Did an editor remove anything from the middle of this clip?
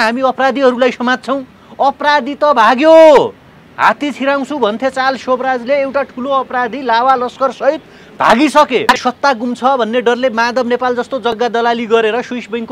yes; 2 cuts; at 9.0 s, 11.3 s

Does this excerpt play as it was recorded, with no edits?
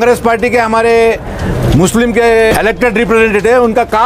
no; 1 cut; at 2.5 s

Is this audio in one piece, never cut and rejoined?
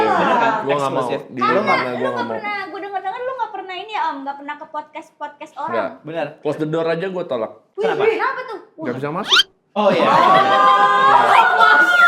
yes; 0 cuts

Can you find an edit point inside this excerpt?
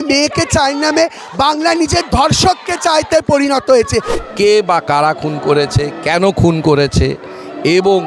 yes; 1 cut; at 4.2 s

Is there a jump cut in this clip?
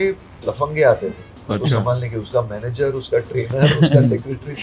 no; 0 cuts

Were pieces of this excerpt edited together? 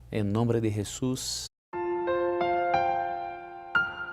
no; 0 cuts

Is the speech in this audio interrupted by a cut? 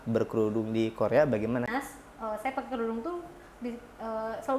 yes; 1 cut; at 1.7 s

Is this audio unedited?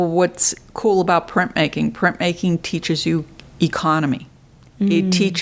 yes; 0 cuts

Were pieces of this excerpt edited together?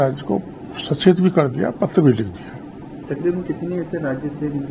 no; 0 cuts

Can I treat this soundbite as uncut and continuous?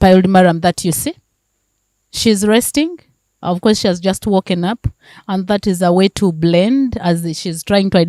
yes; 0 cuts

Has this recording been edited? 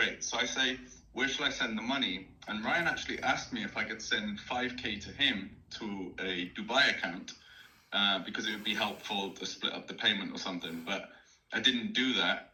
no; 0 cuts

